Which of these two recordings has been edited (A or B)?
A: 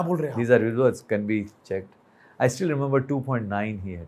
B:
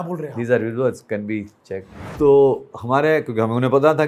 B